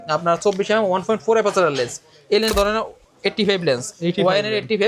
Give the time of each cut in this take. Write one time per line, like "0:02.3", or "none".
0:02.5